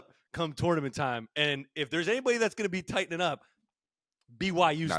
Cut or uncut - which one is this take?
uncut